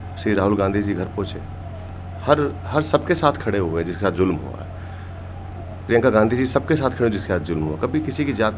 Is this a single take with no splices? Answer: yes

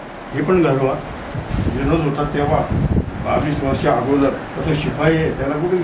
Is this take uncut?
no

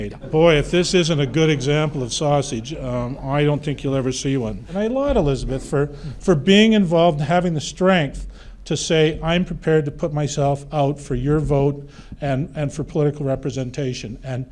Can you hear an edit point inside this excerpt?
no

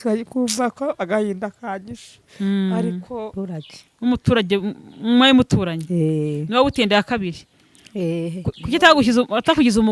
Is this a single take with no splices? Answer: no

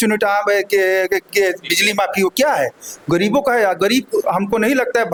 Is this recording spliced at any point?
no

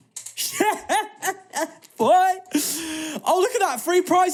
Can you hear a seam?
no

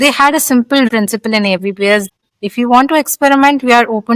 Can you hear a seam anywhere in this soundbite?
yes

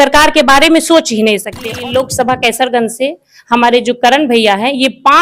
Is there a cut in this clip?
yes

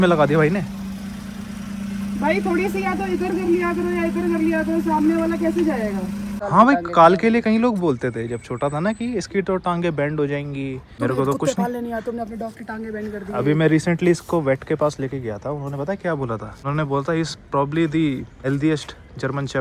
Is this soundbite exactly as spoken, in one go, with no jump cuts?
no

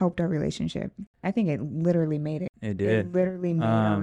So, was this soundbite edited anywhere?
yes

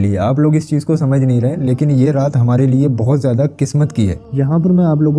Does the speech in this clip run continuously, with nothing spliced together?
no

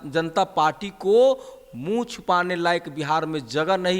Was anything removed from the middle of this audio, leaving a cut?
no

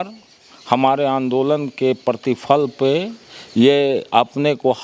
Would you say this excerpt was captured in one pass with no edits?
yes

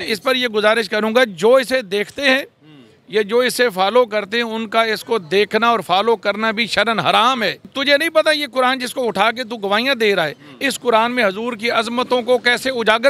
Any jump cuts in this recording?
yes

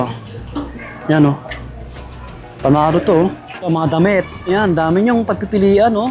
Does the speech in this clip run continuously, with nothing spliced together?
no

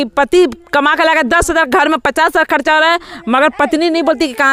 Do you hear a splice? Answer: no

